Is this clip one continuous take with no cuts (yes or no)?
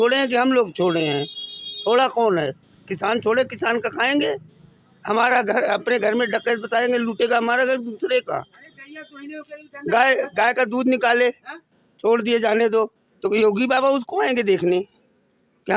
yes